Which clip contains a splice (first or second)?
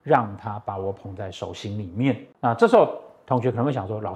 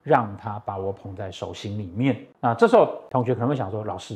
second